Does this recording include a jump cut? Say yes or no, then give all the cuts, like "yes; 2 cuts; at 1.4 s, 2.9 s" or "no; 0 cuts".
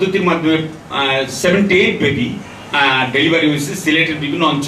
no; 0 cuts